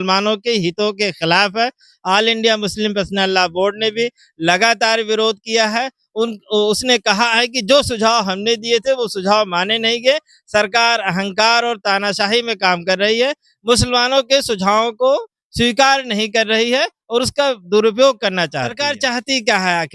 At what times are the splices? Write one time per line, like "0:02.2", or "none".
0:18.8

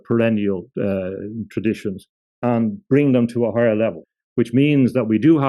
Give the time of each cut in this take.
0:04.0

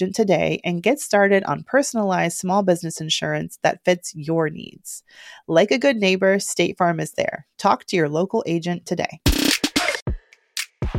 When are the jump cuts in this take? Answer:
0:10.0

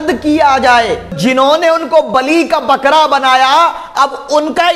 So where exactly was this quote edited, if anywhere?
0:01.2

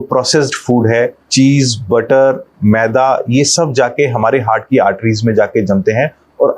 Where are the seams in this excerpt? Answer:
0:01.2

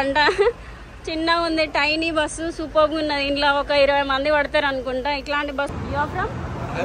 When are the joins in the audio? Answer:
0:05.7

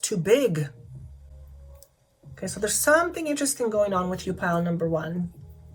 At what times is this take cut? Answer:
none

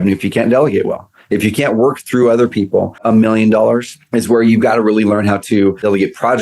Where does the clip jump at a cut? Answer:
0:02.9
0:04.0
0:05.4

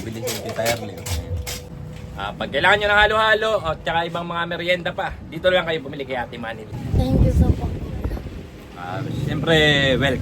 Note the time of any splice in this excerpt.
0:01.7
0:06.7

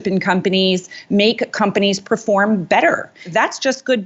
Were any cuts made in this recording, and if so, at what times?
none

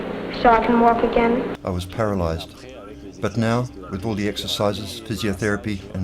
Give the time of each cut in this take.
0:01.6

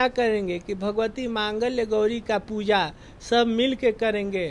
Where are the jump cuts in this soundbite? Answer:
none

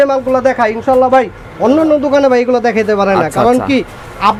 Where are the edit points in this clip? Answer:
none

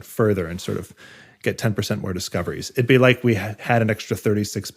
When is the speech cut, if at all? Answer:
0:03.5

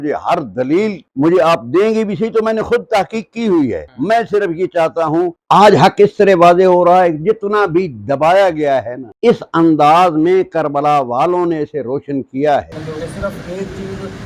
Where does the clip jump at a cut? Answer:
0:05.3
0:12.7

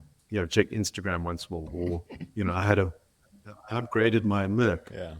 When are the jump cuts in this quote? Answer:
0:01.7

